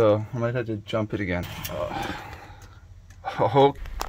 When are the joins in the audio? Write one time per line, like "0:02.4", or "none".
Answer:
0:01.5